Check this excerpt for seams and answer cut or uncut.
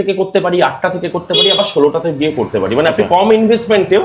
uncut